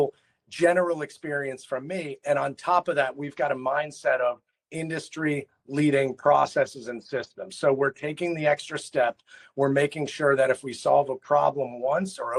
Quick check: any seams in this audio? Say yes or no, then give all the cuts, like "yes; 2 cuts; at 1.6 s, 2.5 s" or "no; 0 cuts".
no; 0 cuts